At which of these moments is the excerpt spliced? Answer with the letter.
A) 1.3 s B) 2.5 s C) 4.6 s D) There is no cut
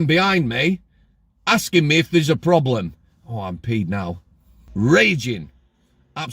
C